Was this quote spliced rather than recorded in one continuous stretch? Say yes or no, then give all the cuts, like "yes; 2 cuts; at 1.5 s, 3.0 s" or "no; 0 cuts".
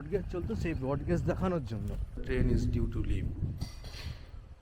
yes; 1 cut; at 2.2 s